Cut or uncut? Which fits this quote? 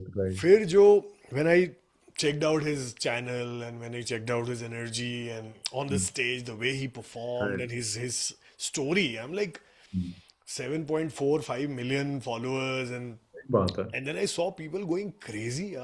uncut